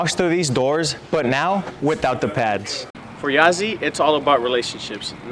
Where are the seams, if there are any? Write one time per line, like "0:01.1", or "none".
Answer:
0:03.0